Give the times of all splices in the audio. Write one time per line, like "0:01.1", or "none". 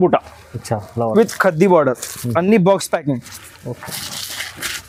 none

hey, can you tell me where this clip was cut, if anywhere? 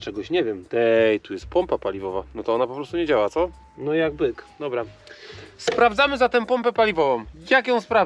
none

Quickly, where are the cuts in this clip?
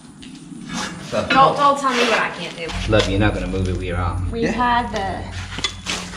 0:02.6
0:04.2

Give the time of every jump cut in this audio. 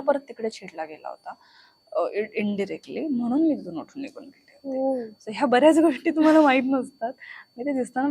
none

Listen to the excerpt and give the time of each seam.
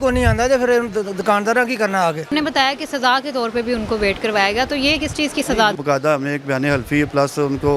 0:02.3
0:05.8

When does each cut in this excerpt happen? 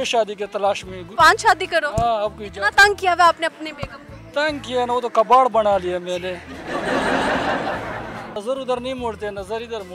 0:01.0
0:08.4

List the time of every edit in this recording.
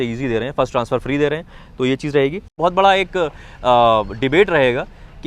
0:02.6

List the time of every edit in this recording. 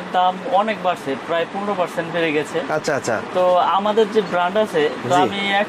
none

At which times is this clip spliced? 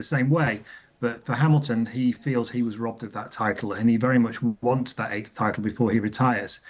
0:05.6

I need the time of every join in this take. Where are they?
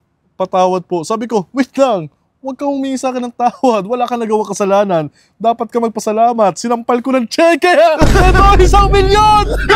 none

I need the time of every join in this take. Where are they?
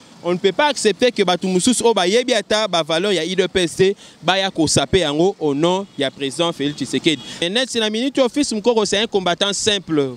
0:07.4

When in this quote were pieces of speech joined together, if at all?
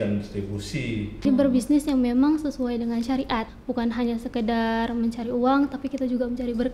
0:01.2
0:03.6

